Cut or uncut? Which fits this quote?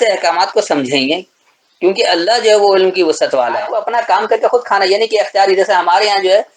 cut